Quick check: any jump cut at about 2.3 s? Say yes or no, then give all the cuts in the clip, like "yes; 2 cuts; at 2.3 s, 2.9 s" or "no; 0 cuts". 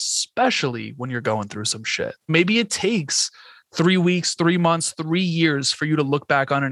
yes; 1 cut; at 2.3 s